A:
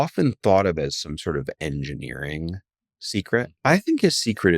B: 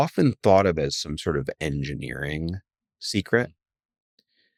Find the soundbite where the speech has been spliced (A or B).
A